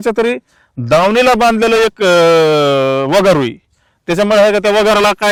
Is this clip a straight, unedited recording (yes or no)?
yes